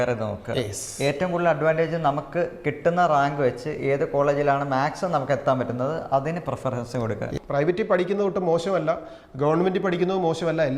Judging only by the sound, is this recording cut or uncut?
cut